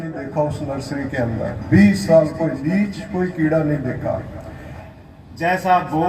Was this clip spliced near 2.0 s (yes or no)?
no